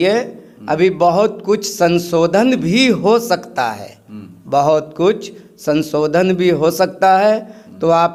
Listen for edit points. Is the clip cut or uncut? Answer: uncut